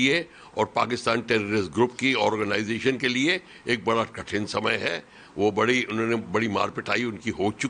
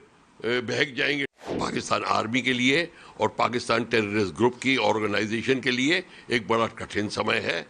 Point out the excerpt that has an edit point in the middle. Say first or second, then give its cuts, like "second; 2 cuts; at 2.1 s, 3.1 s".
second; 1 cut; at 1.6 s